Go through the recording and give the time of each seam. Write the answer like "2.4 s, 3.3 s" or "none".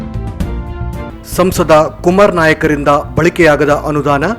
1.1 s